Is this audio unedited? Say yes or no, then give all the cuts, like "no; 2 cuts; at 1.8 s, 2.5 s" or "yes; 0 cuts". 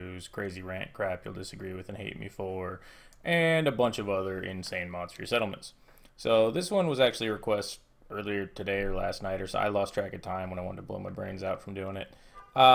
yes; 0 cuts